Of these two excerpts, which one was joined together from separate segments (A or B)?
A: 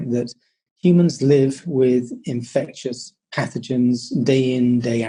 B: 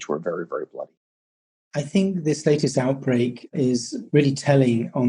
B